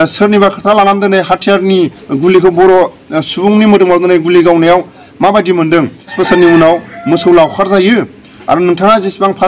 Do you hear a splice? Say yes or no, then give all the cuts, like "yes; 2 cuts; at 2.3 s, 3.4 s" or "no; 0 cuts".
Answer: yes; 1 cut; at 6.1 s